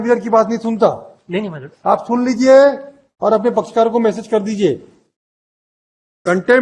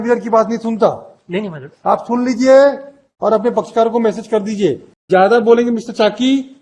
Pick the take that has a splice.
second; 1 cut; at 4.9 s

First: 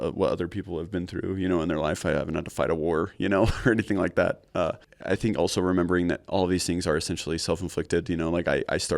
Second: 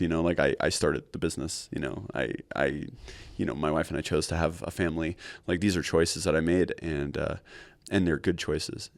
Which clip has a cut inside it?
first; 1 cut; at 4.9 s

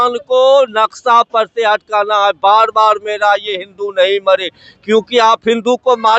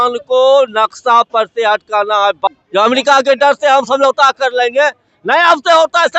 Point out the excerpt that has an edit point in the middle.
second; 1 cut; at 2.5 s

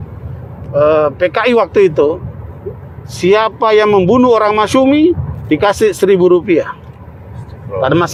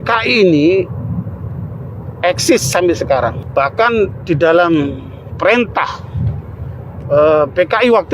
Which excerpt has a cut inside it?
second; 1 cut; at 3.4 s

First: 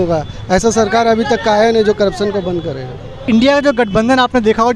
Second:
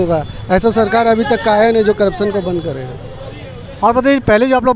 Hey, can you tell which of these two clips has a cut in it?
first; 1 cut; at 3.2 s

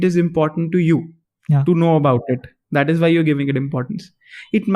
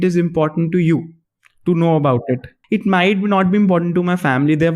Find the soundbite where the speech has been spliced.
second; 1 cut; at 2.5 s

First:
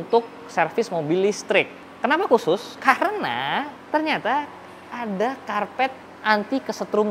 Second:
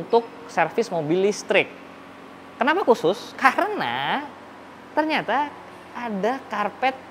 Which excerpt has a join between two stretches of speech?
first; 3 cuts; at 1.8 s, 3.8 s, 6.1 s

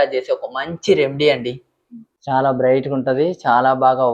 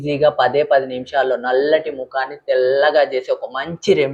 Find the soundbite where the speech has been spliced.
first; 1 cut; at 2.1 s

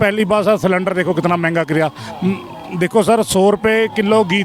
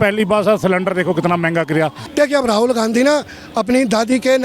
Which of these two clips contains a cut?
second; 1 cut; at 2.0 s

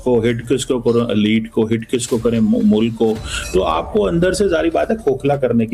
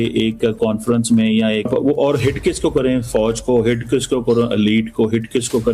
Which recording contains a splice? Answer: second; 1 cut; at 1.7 s

